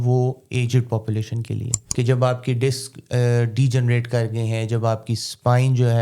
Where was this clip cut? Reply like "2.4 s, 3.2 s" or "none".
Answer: 1.8 s